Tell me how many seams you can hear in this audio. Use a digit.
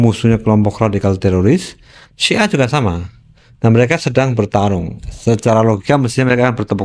0